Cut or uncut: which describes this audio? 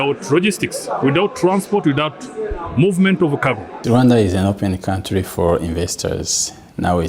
cut